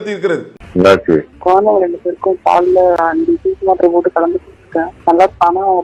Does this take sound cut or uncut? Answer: uncut